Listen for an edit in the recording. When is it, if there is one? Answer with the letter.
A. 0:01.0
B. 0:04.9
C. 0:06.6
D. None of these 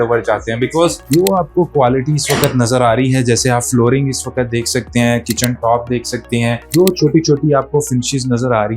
A